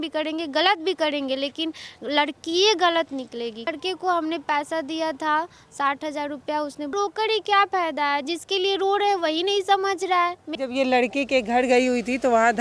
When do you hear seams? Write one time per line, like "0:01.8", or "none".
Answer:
0:03.7
0:06.9
0:10.5